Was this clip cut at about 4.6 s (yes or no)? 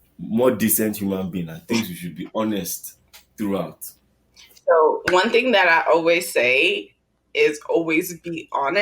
yes